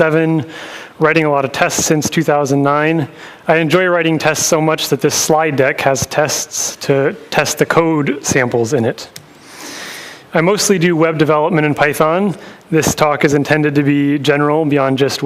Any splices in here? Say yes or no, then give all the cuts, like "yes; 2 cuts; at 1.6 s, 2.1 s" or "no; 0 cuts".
yes; 1 cut; at 8.0 s